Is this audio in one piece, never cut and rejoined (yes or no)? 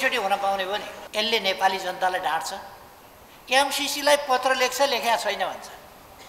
no